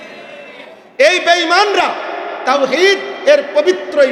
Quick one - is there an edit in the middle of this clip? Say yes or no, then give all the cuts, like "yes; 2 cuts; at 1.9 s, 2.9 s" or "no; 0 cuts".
no; 0 cuts